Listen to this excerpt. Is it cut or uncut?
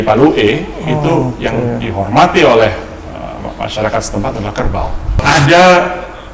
cut